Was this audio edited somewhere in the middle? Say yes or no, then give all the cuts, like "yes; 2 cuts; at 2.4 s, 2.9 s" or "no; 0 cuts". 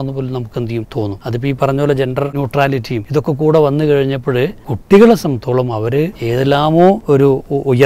yes; 5 cuts; at 1.1 s, 2.7 s, 4.7 s, 6.2 s, 7.0 s